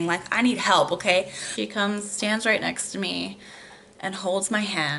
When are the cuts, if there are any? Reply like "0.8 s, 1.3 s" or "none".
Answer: 1.4 s